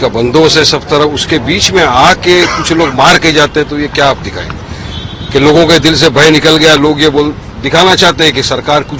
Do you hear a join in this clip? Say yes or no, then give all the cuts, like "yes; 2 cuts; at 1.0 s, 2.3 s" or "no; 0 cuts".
no; 0 cuts